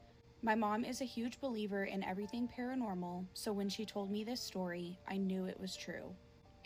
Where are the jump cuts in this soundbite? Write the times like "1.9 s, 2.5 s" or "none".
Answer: none